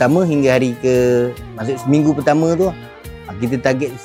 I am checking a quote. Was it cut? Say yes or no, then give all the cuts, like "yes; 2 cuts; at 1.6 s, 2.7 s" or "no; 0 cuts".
no; 0 cuts